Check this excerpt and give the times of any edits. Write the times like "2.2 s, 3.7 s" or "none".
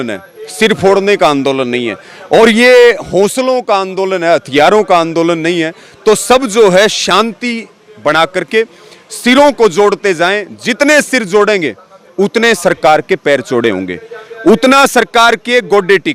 none